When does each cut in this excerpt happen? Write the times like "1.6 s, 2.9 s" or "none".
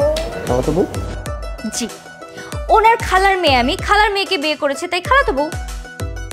none